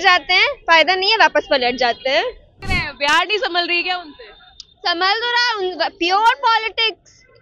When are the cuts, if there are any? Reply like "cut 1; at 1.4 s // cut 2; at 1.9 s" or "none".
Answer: cut 1; at 2.6 s

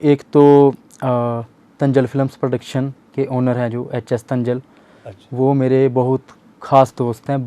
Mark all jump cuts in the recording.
none

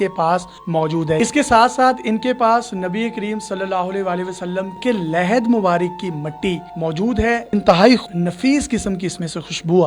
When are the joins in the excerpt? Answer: cut 1; at 1.2 s // cut 2; at 4.8 s // cut 3; at 7.4 s // cut 4; at 8.1 s

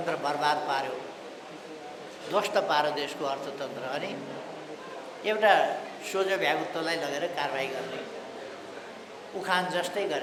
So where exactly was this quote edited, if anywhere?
none

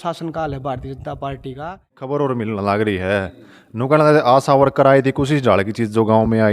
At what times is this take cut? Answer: cut 1; at 2.1 s

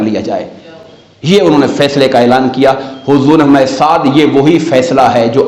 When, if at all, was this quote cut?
none

